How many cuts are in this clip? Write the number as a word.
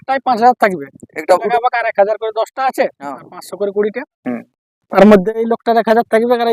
one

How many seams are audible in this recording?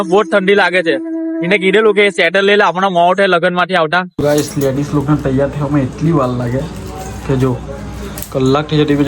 one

